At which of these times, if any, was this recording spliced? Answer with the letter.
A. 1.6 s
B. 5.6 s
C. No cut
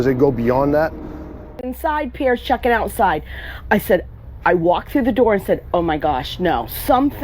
A